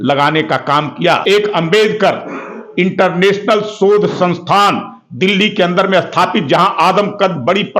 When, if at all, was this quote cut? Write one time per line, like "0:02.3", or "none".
0:01.2